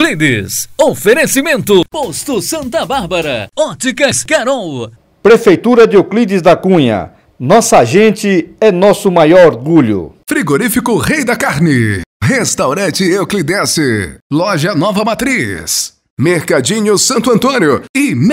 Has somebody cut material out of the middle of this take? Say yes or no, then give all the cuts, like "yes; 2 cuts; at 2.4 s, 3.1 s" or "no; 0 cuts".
no; 0 cuts